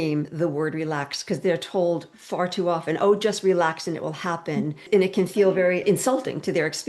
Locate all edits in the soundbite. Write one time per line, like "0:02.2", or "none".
0:04.8
0:05.8